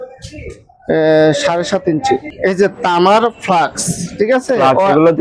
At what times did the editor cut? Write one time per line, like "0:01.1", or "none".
0:02.3